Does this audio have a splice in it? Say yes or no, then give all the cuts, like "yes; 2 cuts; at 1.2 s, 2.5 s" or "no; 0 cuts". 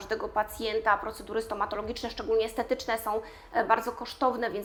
no; 0 cuts